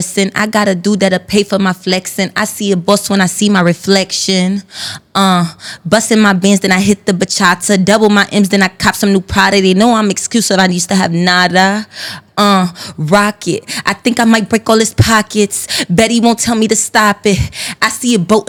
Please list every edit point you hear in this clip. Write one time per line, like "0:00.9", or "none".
none